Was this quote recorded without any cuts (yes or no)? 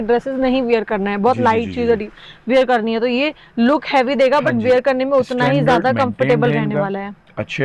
yes